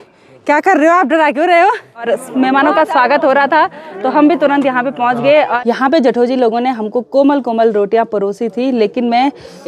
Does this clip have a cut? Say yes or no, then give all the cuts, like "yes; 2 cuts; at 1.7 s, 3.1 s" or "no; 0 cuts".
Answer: yes; 2 cuts; at 2.1 s, 5.6 s